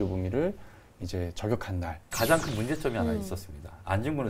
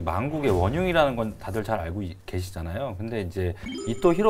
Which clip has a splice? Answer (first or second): first